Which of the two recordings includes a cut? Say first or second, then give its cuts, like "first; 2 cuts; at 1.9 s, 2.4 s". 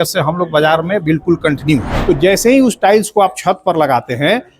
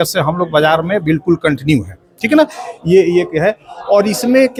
first; 1 cut; at 1.9 s